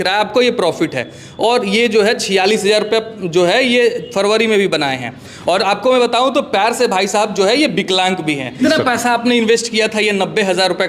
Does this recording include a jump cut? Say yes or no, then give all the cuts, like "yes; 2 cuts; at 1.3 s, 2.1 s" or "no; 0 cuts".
yes; 1 cut; at 8.6 s